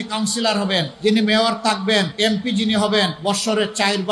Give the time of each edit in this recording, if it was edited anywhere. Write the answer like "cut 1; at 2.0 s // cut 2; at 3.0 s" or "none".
cut 1; at 0.9 s // cut 2; at 2.1 s // cut 3; at 3.2 s